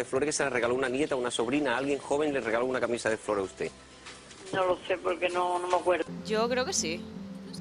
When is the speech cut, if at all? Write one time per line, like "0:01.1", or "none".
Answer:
0:06.1